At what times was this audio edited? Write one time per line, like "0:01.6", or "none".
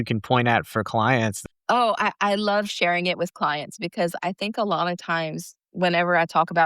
0:01.4